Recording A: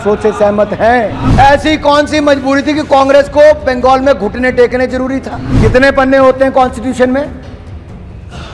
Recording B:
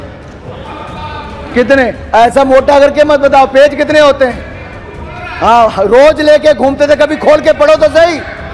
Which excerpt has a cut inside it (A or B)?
A